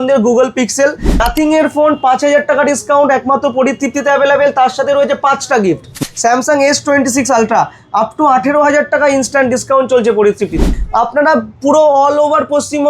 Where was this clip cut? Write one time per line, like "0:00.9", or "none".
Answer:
0:01.2
0:06.0
0:10.7